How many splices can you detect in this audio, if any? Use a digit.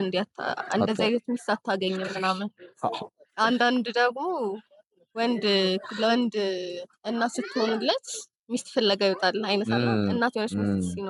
0